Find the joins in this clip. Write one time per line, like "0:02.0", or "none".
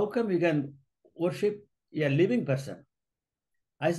none